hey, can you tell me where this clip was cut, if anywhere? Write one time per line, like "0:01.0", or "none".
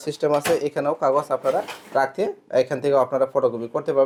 none